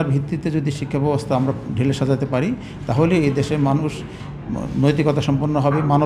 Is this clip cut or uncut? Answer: uncut